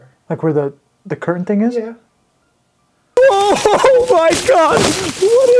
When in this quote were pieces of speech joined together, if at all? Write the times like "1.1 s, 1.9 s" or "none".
3.2 s

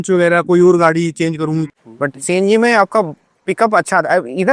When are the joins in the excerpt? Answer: 1.7 s

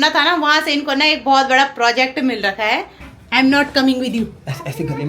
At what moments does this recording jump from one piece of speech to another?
3.0 s

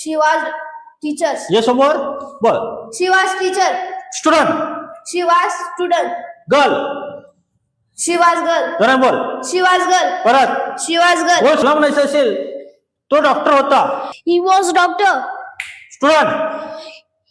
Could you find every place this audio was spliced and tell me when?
none

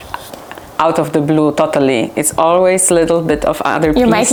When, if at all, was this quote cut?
none

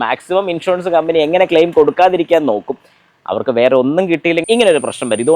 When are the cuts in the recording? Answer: 4.4 s

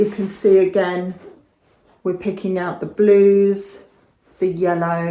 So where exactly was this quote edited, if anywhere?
none

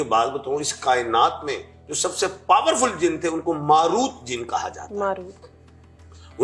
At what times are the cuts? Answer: none

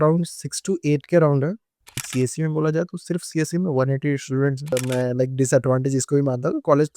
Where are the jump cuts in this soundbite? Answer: 2.1 s, 4.7 s

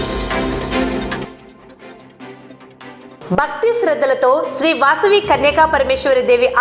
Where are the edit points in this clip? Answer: none

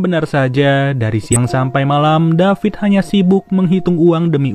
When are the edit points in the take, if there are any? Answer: 1.3 s

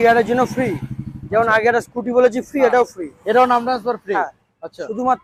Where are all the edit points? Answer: none

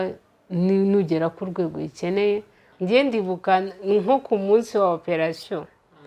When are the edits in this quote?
2.6 s

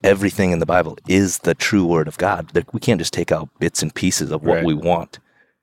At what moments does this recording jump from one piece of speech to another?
none

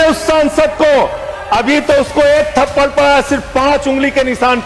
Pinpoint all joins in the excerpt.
none

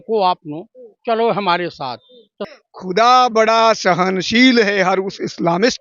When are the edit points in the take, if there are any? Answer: 2.4 s

